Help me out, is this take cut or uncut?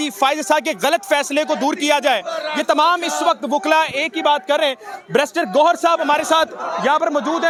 uncut